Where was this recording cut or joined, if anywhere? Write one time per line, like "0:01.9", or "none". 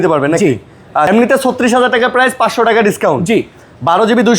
0:01.1